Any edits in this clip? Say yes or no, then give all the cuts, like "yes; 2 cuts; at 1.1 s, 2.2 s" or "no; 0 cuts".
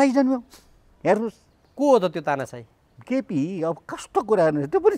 no; 0 cuts